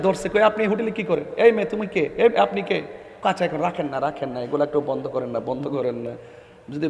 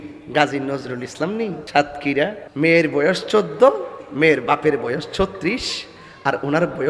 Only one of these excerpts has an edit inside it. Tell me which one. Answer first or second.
second